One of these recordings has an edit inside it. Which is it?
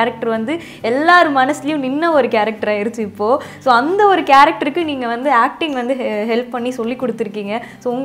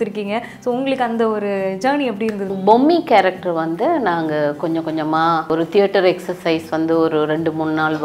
second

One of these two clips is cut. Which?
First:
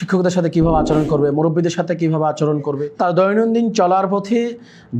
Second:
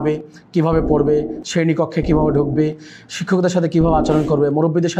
first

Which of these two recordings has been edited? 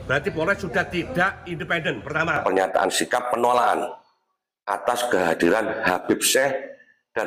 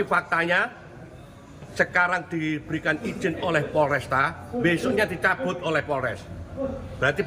first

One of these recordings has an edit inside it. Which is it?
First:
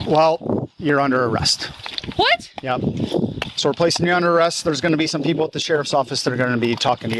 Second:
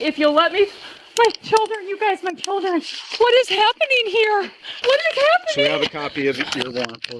second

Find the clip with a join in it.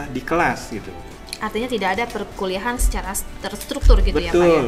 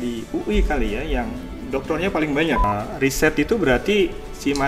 second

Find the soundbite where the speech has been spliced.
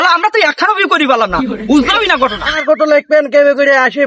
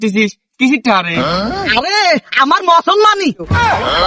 first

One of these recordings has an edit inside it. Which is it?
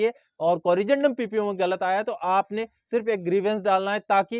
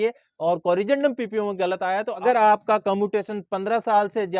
second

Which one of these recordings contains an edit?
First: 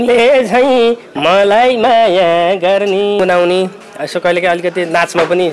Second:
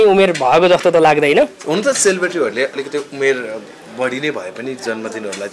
first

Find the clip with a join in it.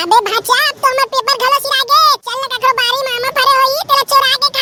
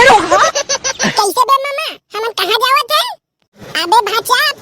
second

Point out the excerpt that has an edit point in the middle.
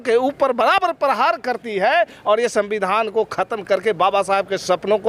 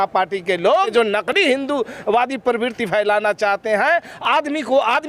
second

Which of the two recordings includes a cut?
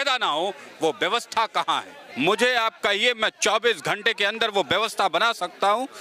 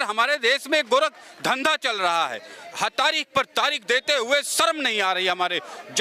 first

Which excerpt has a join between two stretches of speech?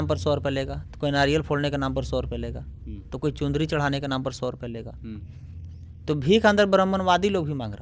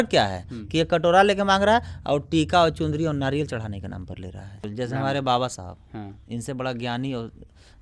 second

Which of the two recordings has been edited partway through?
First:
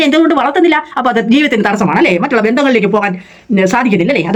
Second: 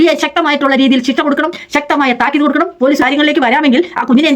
second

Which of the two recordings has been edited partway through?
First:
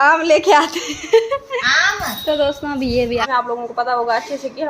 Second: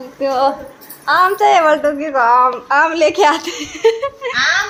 first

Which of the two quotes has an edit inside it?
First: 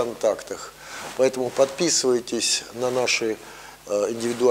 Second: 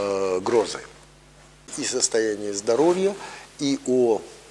second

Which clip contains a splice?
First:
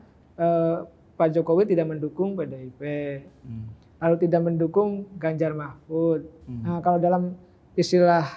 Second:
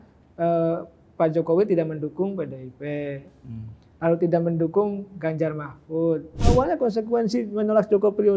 second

